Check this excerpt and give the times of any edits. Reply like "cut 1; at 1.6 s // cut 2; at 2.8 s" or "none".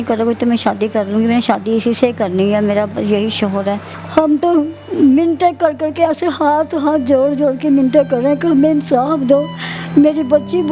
cut 1; at 3.9 s